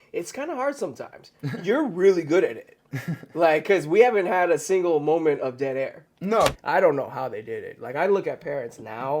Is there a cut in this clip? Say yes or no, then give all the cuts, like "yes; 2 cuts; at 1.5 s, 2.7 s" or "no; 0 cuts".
yes; 1 cut; at 6.6 s